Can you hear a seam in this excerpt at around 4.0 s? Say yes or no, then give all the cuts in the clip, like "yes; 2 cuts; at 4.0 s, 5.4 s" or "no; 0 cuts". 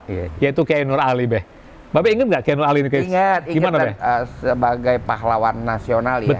yes; 1 cut; at 4.0 s